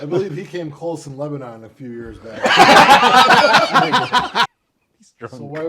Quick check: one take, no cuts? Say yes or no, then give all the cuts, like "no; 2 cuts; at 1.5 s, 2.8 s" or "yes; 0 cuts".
no; 1 cut; at 4.5 s